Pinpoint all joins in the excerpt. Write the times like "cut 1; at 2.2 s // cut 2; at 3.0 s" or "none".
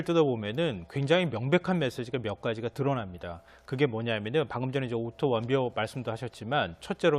cut 1; at 5.7 s